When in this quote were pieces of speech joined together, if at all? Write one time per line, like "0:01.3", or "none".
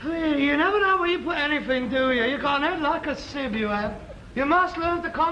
0:01.6